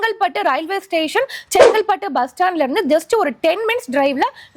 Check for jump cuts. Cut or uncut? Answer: uncut